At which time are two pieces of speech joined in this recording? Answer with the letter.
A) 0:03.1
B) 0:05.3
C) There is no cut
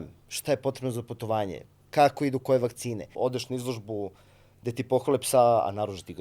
A